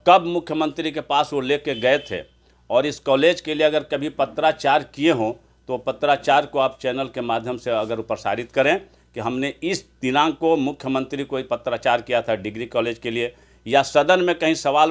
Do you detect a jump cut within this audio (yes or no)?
no